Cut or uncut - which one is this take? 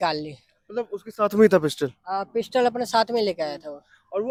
uncut